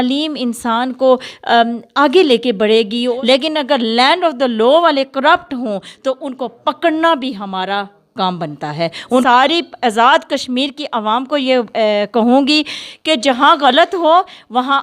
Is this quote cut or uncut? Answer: cut